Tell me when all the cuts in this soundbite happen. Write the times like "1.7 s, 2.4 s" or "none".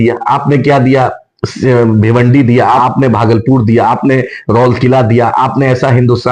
2.8 s